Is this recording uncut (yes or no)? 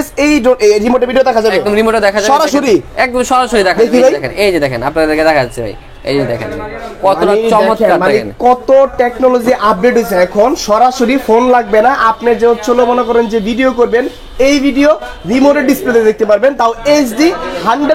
yes